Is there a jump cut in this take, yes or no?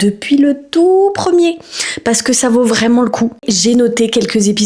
no